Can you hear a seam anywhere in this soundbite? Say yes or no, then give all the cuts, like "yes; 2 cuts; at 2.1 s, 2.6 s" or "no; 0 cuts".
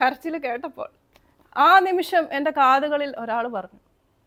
no; 0 cuts